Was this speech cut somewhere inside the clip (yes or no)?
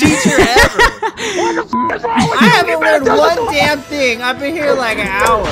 no